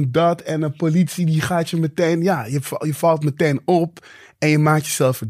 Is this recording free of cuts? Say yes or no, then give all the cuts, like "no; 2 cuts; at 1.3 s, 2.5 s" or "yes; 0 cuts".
yes; 0 cuts